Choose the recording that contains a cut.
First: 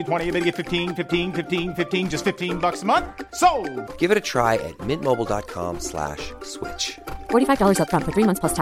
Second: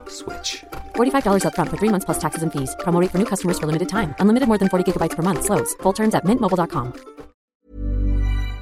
second; 1 cut; at 7.4 s

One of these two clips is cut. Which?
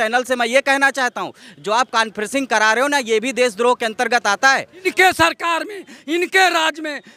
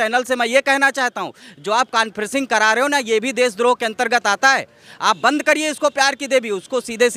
first; 1 cut; at 4.9 s

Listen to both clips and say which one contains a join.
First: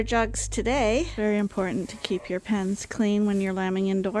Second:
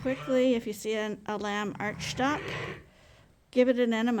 first; 1 cut; at 1.1 s

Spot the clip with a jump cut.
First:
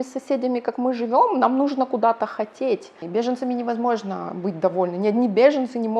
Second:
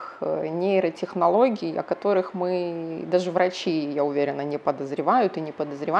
first; 1 cut; at 3.0 s

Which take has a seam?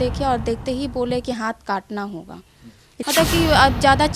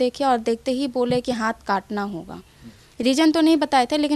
first; 1 cut; at 2.9 s

